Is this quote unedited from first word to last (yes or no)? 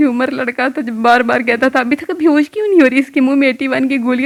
yes